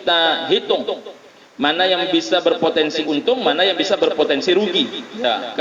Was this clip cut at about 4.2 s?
no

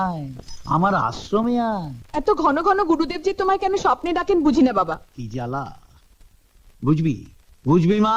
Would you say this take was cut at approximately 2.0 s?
yes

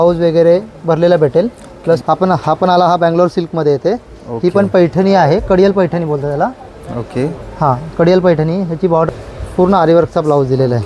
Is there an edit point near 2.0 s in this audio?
yes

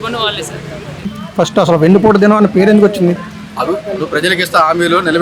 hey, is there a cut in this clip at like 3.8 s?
no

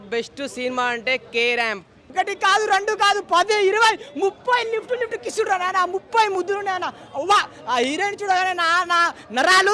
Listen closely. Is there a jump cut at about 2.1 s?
yes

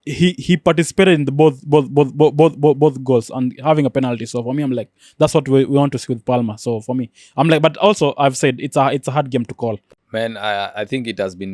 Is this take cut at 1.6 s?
no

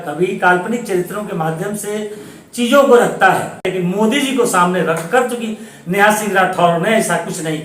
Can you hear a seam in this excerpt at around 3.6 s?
yes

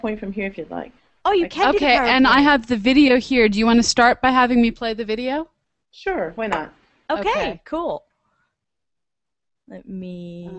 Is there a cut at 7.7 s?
no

